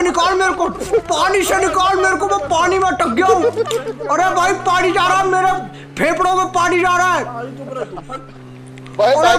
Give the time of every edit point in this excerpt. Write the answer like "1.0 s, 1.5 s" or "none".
none

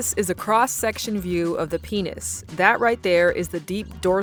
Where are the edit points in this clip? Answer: none

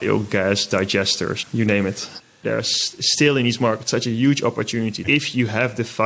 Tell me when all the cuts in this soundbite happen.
2.3 s, 5.0 s

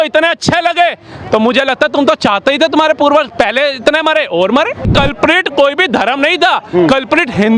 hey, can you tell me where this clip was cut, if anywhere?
4.9 s

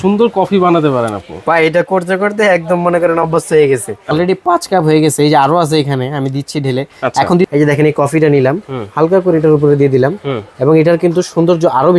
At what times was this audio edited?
4.1 s, 7.5 s

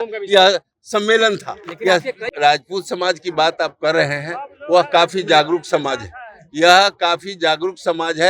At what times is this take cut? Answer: 2.3 s

